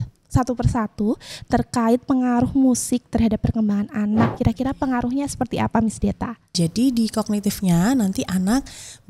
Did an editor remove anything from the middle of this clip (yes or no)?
yes